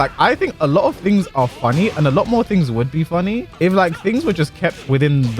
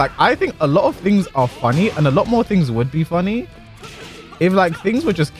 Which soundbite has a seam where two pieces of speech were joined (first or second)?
first